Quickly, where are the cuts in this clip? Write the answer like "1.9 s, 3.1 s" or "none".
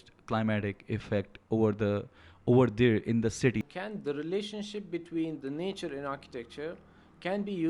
3.6 s